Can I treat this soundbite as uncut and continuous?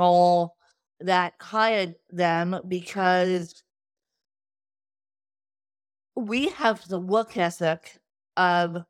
yes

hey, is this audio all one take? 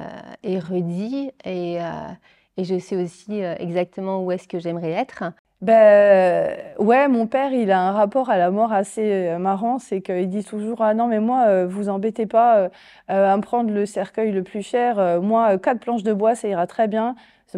no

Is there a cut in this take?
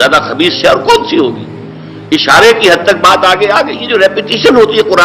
yes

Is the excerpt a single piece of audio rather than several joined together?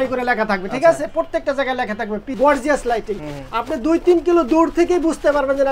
no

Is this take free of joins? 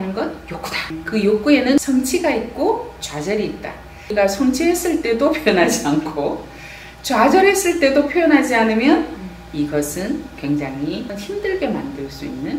no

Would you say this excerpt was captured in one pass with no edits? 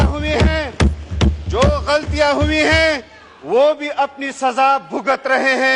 yes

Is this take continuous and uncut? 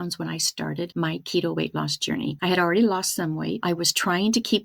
no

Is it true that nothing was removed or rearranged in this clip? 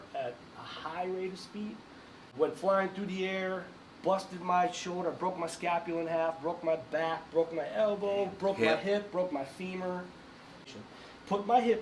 no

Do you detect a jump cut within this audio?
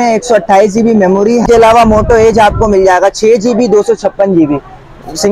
yes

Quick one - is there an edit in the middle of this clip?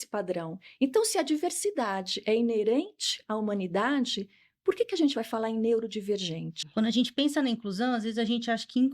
yes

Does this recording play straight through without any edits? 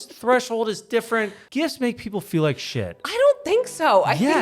no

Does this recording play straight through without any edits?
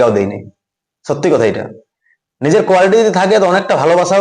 yes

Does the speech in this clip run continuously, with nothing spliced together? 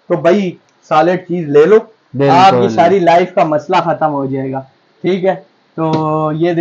yes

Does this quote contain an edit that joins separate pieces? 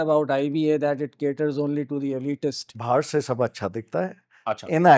yes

